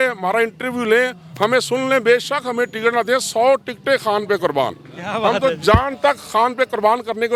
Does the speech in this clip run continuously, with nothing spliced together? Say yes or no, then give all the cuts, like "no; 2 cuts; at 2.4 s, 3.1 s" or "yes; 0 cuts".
yes; 0 cuts